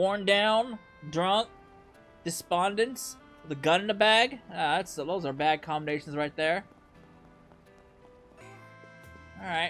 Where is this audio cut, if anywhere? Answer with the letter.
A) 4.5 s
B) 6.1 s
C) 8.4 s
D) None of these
C